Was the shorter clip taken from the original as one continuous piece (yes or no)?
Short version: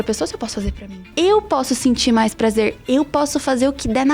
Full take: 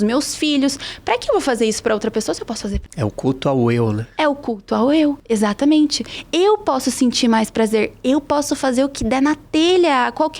no